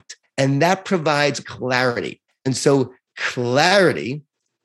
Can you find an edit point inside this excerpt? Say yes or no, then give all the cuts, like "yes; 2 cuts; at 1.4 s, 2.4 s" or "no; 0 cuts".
yes; 1 cut; at 1.5 s